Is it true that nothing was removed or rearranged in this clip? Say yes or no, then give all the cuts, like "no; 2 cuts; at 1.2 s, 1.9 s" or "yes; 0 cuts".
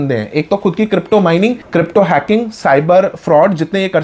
yes; 0 cuts